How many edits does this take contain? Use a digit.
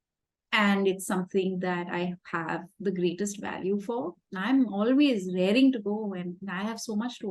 1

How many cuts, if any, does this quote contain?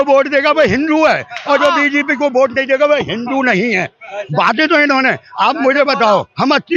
0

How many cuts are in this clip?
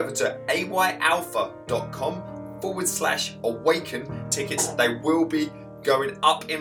1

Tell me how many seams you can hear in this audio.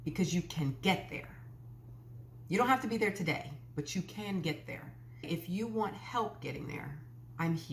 1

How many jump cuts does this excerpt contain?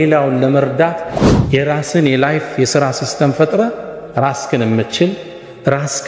1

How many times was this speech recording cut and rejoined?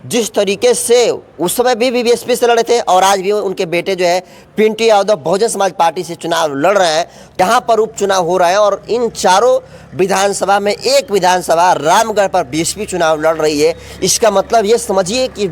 1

